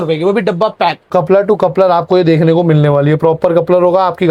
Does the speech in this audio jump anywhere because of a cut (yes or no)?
yes